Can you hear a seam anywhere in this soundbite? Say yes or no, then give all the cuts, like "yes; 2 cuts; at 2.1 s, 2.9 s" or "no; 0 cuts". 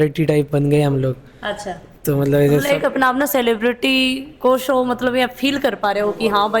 no; 0 cuts